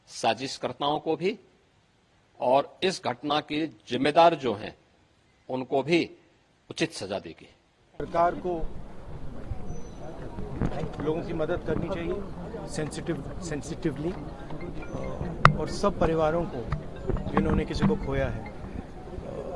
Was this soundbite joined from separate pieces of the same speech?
no; 0 cuts

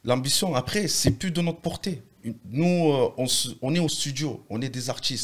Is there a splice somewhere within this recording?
no; 0 cuts

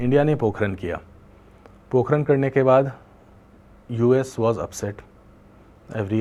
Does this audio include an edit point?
no; 0 cuts

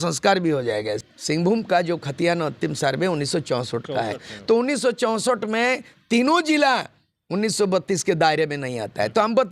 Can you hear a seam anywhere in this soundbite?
yes; 1 cut; at 1.1 s

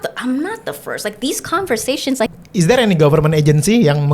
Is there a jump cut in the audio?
yes; 1 cut; at 2.3 s

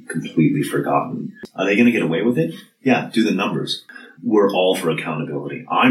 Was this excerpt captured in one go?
no; 2 cuts; at 1.3 s, 3.8 s

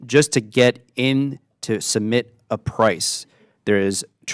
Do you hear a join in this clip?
no; 0 cuts

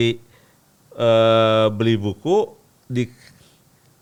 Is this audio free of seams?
yes; 0 cuts

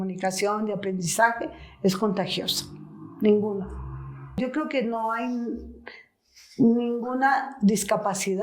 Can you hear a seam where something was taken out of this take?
yes; 1 cut; at 4.4 s

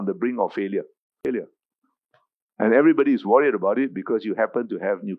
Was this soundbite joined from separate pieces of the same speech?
yes; 1 cut; at 1.2 s

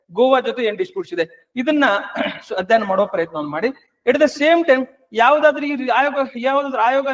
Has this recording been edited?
no; 0 cuts

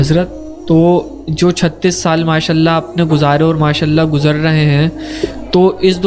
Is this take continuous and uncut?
yes; 0 cuts

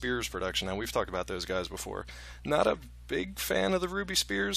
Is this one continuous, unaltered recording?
yes; 0 cuts

